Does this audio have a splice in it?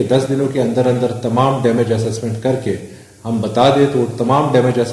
no; 0 cuts

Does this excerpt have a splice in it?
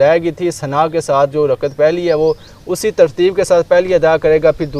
no; 0 cuts

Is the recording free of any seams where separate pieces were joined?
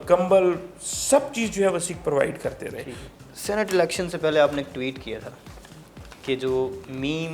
no; 1 cut; at 3.0 s

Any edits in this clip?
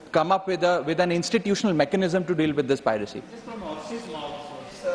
no; 0 cuts

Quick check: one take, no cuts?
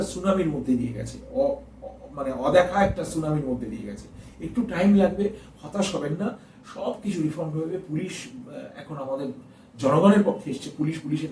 yes; 0 cuts

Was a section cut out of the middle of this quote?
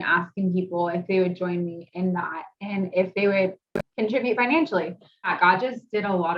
yes; 1 cut; at 5.3 s

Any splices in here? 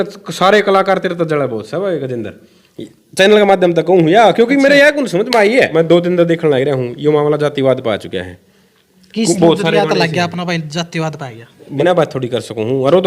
yes; 2 cuts; at 5.7 s, 11.8 s

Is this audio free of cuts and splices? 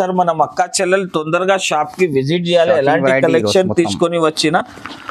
yes; 0 cuts

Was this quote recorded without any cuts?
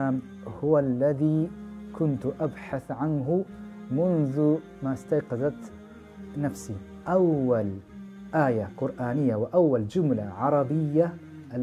no; 1 cut; at 6.9 s

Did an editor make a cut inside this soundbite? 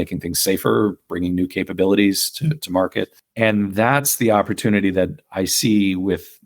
yes; 1 cut; at 3.2 s

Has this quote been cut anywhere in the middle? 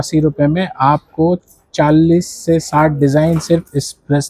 no; 0 cuts

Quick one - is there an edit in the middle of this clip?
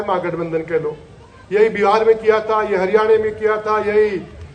no; 0 cuts

